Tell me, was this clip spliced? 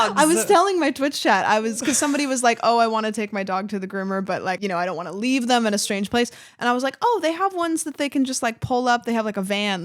yes; 1 cut; at 4.6 s

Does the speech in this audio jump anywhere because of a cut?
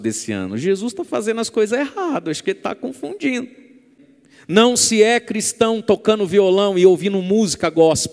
yes; 1 cut; at 3.9 s

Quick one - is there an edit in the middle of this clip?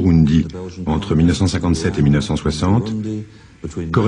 no; 0 cuts

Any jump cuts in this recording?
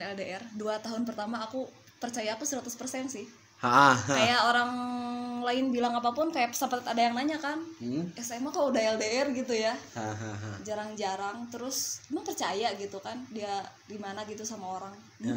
no; 0 cuts

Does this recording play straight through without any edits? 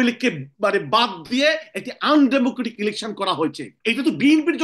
no; 1 cut; at 3.7 s

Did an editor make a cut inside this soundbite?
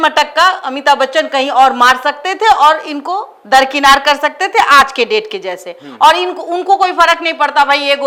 no; 0 cuts

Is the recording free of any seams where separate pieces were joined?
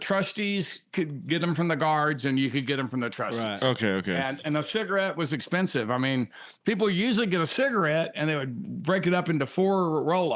yes; 0 cuts

